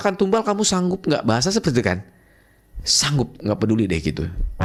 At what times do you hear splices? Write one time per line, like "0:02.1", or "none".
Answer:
none